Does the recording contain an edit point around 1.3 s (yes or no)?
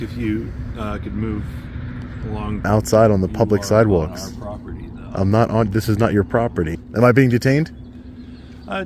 no